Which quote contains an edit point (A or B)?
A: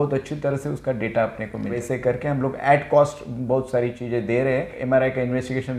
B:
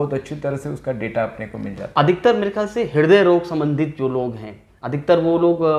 A